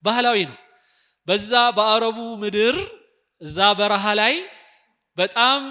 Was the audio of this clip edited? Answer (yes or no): no